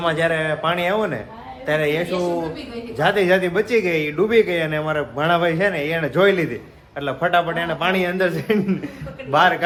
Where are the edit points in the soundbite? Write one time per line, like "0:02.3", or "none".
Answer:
none